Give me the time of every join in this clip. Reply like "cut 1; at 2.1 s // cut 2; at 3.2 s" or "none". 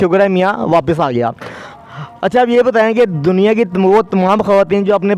none